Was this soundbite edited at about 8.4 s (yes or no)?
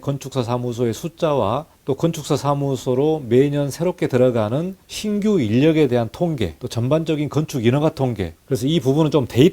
yes